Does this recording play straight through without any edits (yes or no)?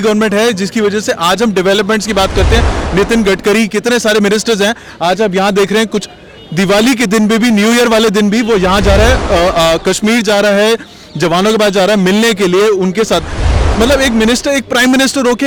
yes